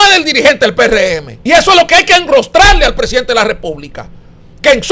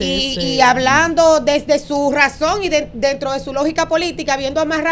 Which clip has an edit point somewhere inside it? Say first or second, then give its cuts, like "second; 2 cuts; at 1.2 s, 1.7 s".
first; 1 cut; at 1.3 s